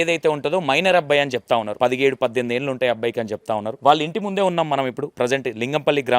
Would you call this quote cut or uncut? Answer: cut